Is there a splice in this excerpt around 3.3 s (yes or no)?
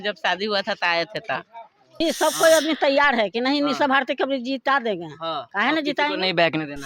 no